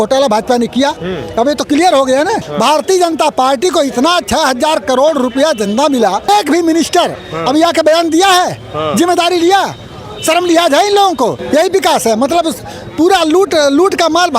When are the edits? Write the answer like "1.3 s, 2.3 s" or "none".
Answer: 2.5 s, 6.3 s, 11.4 s